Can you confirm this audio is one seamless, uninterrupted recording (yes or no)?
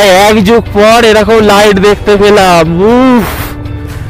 yes